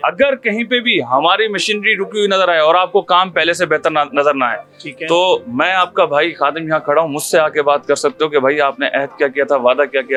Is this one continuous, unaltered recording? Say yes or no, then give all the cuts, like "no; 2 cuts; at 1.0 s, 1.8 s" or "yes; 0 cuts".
yes; 0 cuts